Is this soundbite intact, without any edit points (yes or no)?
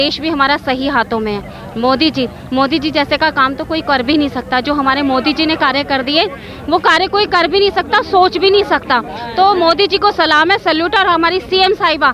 yes